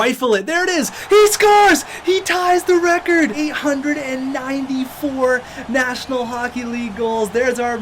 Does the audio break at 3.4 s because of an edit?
yes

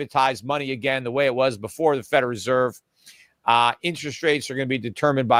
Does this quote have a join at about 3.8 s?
no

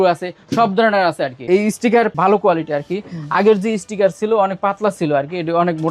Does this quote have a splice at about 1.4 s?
yes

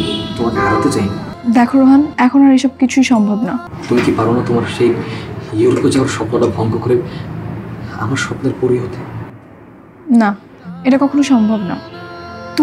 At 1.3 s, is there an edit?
yes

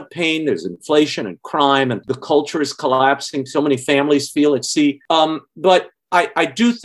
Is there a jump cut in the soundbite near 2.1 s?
yes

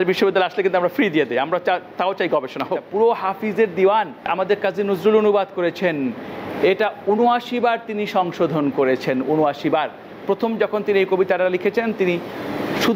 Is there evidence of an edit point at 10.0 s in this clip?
no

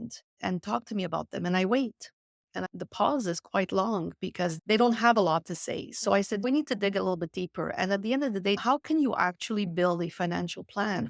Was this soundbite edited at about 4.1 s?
no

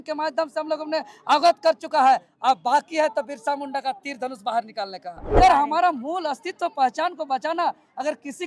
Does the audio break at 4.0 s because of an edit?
no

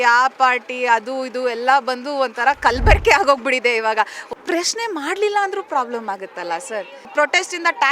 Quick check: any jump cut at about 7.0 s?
yes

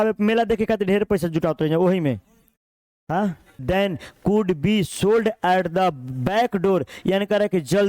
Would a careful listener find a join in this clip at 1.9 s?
no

